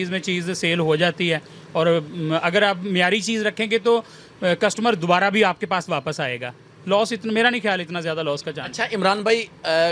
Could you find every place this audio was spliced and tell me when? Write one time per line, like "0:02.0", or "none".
none